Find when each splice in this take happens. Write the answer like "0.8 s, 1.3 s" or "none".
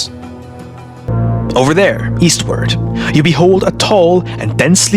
1.1 s